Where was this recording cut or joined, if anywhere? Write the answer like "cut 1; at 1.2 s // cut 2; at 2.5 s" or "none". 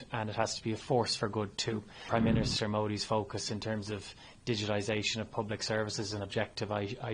cut 1; at 2.0 s

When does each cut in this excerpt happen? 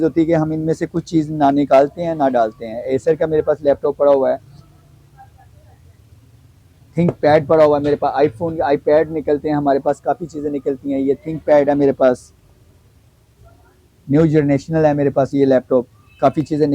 none

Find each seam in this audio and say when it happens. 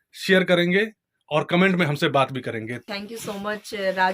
cut 1; at 2.9 s

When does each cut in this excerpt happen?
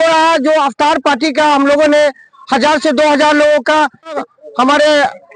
cut 1; at 4.2 s

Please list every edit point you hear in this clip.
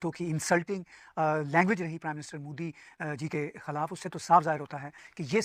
none

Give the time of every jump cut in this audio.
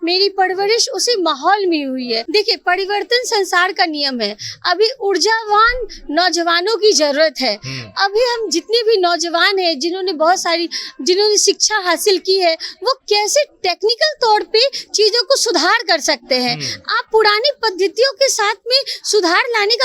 cut 1; at 2.2 s

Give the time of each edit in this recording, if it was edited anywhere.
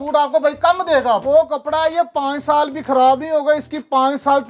cut 1; at 1.2 s

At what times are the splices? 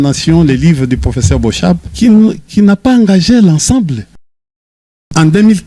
cut 1; at 1.9 s // cut 2; at 4.6 s

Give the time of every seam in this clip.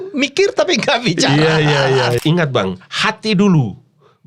cut 1; at 2.2 s

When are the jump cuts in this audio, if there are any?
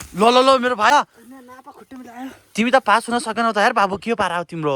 cut 1; at 0.9 s

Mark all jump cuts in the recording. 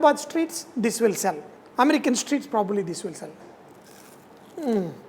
cut 1; at 3.3 s

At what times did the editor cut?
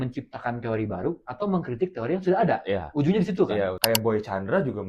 cut 1; at 3.8 s

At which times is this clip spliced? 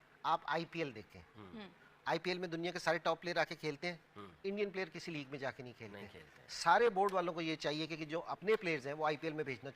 none

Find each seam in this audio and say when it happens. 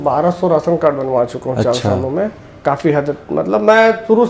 none

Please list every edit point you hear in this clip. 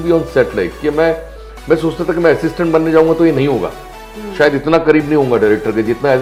none

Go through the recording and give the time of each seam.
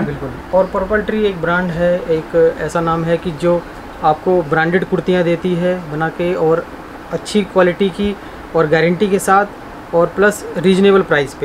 none

